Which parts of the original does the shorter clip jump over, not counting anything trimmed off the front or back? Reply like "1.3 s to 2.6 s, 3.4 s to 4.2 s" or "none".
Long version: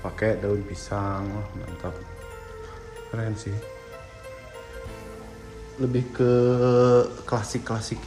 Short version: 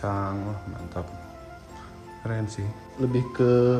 3.7 s to 5.6 s